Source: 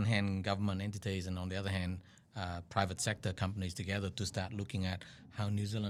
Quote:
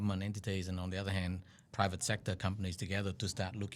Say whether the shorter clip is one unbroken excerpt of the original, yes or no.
no